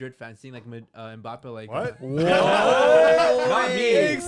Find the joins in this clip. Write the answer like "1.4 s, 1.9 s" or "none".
none